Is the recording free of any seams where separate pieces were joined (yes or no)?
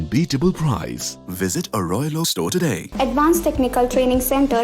no